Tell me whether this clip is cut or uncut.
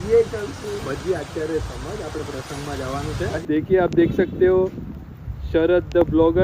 cut